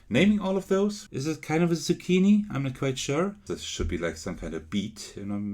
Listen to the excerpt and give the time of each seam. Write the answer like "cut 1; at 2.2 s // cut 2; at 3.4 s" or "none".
cut 1; at 1.0 s // cut 2; at 3.4 s